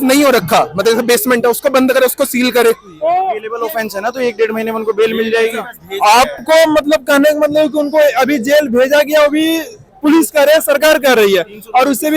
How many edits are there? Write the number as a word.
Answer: one